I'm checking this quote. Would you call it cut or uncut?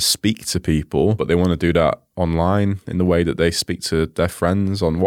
cut